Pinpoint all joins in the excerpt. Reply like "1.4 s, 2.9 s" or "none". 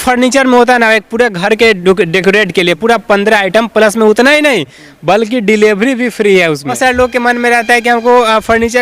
6.8 s